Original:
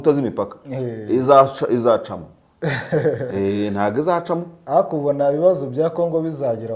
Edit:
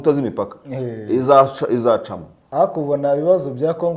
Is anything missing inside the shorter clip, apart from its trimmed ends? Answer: yes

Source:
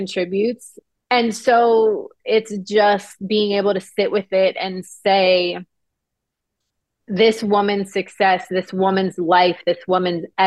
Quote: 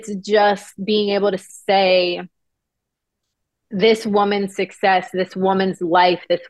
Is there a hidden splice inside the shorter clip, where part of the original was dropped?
yes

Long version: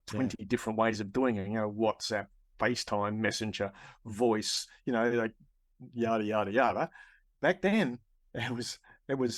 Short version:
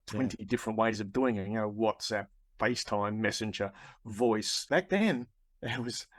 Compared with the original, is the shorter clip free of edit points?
no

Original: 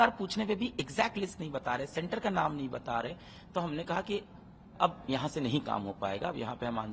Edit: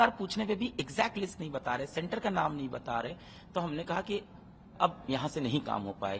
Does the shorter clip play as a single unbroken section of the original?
yes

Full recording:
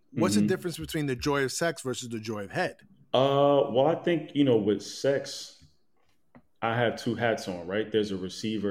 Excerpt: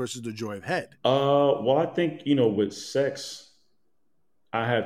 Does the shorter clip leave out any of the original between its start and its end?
yes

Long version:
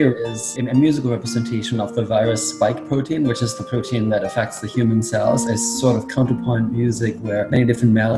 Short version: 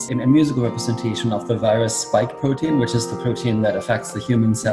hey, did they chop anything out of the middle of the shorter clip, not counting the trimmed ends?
no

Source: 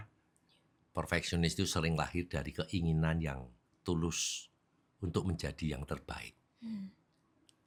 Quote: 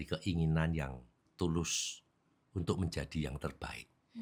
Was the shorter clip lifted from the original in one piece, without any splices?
yes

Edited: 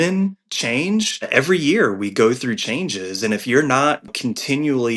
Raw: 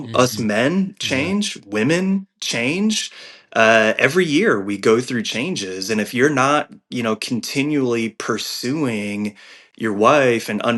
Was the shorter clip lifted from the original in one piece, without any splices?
no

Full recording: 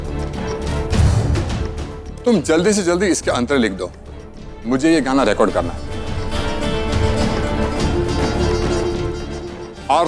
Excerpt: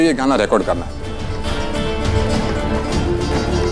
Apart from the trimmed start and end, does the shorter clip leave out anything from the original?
no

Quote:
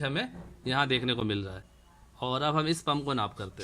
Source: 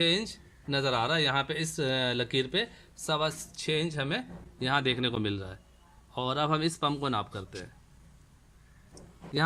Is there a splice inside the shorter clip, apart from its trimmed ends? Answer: no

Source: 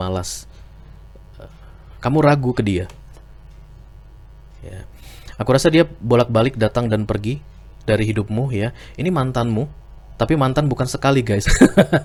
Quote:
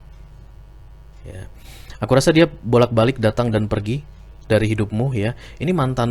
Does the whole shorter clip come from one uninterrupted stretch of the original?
yes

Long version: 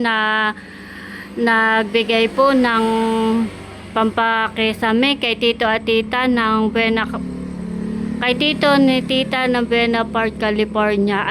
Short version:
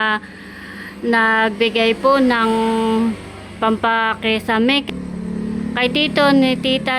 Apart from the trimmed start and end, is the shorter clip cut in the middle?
yes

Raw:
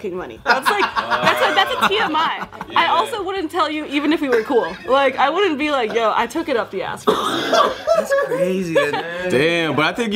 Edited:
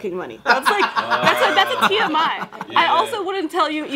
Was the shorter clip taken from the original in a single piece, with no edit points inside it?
yes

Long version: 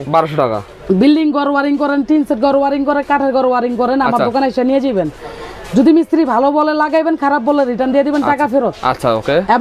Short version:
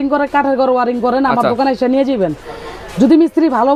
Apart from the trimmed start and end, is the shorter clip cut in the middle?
no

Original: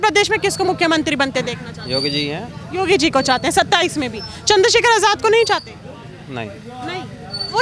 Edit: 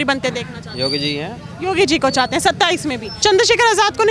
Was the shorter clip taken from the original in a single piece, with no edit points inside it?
no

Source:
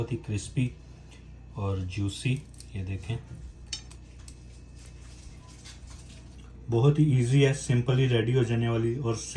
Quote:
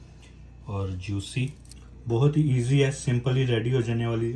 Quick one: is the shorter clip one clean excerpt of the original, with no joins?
no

